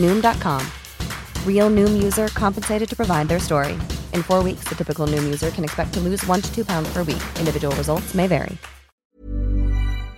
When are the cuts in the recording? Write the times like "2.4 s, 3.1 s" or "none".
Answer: 8.9 s